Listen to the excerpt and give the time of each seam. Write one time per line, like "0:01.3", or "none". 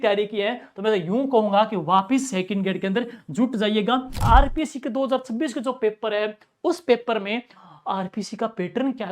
0:04.2